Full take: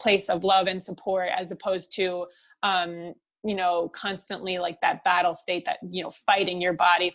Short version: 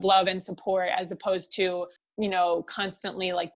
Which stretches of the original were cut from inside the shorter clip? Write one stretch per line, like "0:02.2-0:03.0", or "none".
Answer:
0:02.4-0:03.3